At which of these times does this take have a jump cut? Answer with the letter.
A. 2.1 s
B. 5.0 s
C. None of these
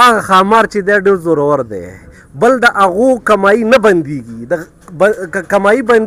C